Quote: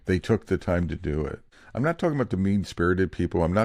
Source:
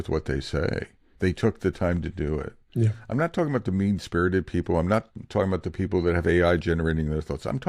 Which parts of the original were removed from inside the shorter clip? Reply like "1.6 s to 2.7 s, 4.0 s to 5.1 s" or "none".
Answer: 2.7 s to 2.9 s

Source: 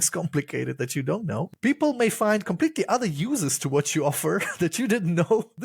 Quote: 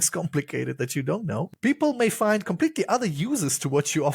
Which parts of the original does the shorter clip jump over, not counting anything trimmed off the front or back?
none

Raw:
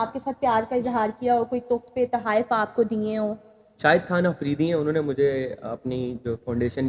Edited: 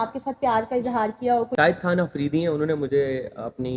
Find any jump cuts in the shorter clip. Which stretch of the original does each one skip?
1.5 s to 3.8 s

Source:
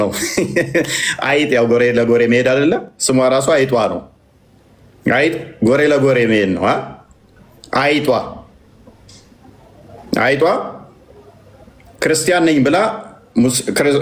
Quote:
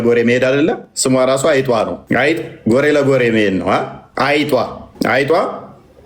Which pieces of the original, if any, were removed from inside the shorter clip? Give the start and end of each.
4.0 s to 4.9 s, 7.0 s to 7.6 s, 8.4 s to 9.9 s

